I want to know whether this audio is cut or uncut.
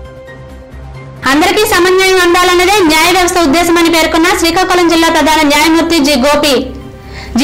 cut